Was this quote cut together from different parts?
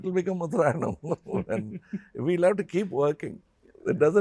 no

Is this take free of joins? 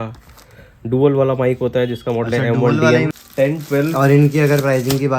no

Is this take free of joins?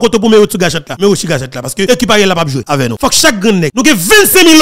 no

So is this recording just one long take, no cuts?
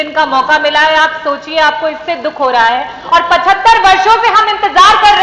yes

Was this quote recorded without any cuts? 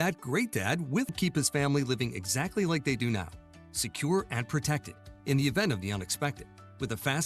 no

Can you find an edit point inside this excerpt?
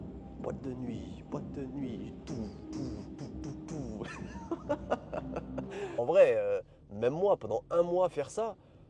yes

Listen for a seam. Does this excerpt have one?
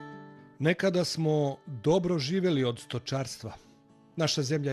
yes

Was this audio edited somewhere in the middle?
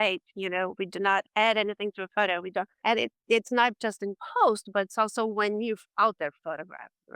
yes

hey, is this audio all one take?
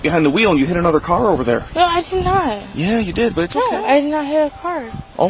no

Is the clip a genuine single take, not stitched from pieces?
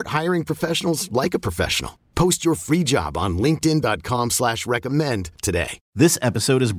no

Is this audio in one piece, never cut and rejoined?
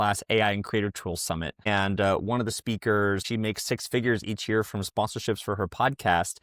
no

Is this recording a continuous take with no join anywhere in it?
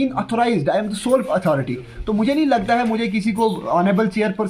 yes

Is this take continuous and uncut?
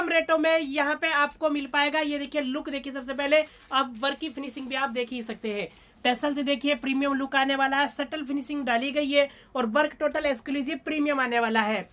yes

